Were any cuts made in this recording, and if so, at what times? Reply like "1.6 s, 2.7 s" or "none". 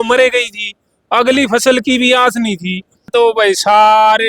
3.1 s